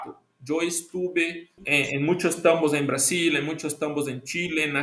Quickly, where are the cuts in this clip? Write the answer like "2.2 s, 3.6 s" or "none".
1.6 s